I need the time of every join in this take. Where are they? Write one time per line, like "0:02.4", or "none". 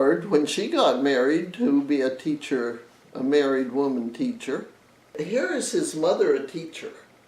0:05.2